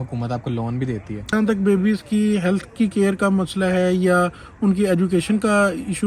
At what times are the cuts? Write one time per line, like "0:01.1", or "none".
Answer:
0:01.3